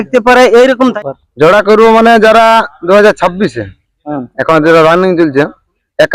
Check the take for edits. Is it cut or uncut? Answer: cut